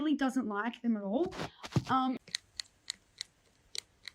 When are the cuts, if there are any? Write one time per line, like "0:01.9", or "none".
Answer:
0:02.2